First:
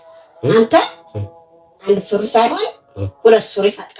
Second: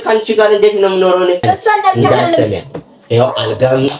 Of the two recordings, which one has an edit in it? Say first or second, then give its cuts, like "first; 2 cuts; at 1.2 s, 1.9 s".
second; 1 cut; at 2.4 s